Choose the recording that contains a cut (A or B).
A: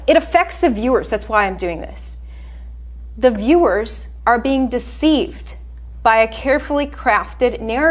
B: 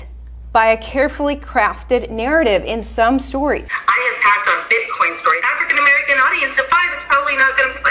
B